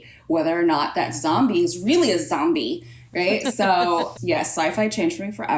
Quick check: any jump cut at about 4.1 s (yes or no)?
yes